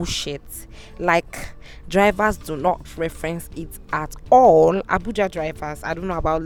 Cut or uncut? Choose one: uncut